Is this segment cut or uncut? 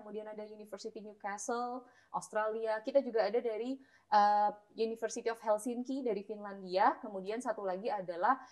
uncut